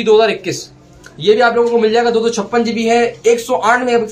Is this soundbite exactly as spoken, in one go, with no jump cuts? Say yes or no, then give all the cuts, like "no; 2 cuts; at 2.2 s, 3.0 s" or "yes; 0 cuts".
yes; 0 cuts